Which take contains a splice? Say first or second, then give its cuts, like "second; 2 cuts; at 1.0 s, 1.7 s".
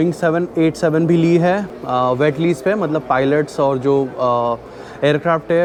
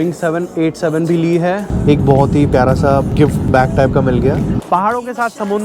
second; 3 cuts; at 1.7 s, 3.2 s, 4.6 s